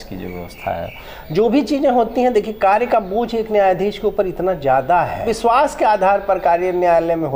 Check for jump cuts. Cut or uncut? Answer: uncut